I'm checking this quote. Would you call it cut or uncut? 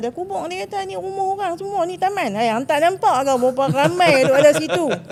uncut